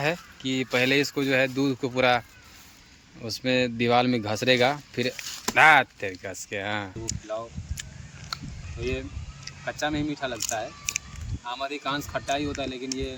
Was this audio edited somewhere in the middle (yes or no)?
no